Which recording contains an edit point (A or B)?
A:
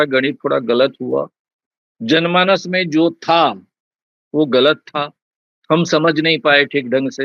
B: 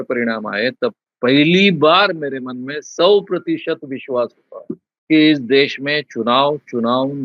B